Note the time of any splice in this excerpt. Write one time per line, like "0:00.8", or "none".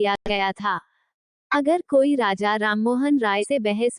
none